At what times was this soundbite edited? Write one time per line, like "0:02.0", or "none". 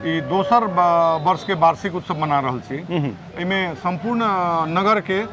none